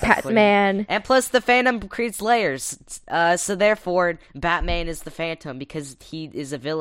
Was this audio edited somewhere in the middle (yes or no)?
yes